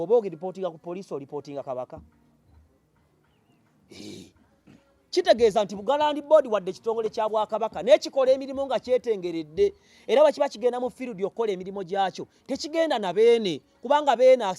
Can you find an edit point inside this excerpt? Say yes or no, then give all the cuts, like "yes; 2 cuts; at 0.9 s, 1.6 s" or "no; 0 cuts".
no; 0 cuts